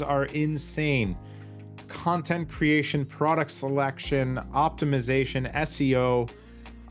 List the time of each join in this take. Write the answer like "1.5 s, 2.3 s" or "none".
none